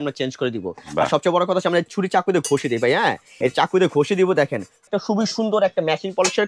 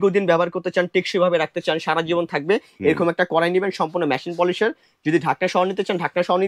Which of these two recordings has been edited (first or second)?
first